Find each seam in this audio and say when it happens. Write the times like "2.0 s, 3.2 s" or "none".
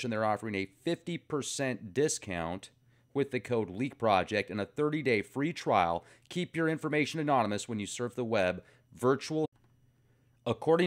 none